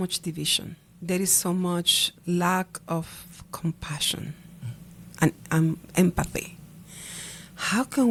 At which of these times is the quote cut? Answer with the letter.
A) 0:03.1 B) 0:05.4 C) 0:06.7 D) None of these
D